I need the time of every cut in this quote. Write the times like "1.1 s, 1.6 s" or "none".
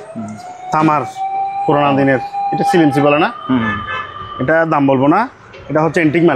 none